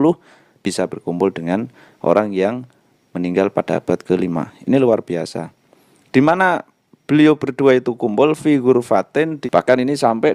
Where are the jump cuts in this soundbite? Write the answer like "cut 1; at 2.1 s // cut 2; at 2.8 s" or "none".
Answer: cut 1; at 9.4 s